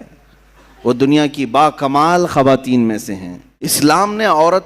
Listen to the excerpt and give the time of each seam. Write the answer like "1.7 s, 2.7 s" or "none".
3.7 s